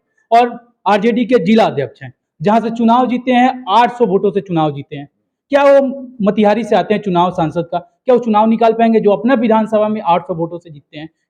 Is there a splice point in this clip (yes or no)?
no